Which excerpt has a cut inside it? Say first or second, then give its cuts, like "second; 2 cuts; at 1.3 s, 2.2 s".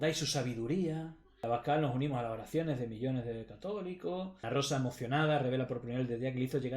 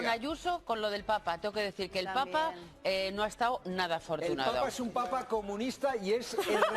first; 2 cuts; at 1.4 s, 4.4 s